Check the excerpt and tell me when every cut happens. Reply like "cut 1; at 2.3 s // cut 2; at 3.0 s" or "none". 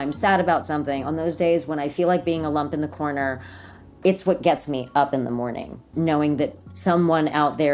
cut 1; at 5.8 s